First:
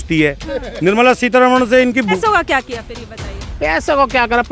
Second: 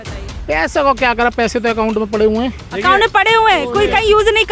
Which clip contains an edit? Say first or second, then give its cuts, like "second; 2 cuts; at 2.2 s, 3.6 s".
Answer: first; 1 cut; at 2.2 s